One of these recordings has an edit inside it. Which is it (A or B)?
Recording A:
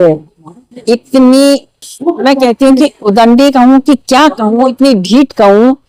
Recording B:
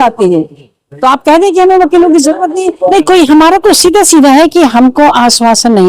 B